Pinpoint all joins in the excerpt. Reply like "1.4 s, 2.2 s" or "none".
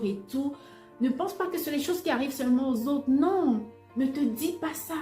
3.8 s